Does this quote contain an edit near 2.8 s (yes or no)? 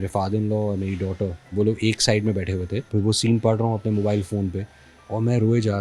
yes